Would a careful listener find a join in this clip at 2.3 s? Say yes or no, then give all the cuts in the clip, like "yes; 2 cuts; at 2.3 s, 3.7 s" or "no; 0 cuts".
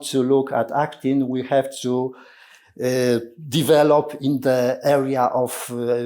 no; 0 cuts